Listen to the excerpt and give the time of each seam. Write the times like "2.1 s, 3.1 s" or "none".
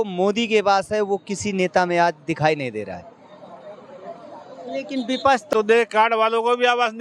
5.5 s